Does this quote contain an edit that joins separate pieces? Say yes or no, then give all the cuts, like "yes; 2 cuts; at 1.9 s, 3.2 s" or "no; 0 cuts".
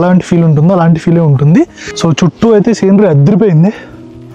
yes; 1 cut; at 1.8 s